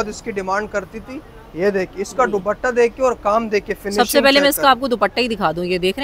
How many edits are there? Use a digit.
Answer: 0